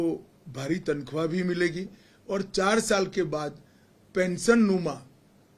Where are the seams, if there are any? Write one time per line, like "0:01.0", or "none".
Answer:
none